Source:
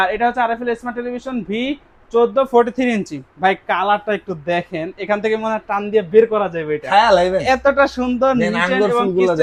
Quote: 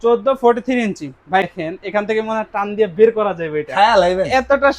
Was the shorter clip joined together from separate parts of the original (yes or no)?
yes